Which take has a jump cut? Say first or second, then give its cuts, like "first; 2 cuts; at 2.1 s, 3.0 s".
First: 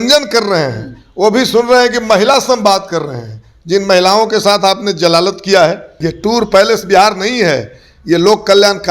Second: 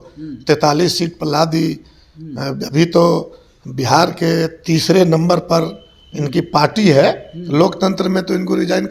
first; 1 cut; at 6.0 s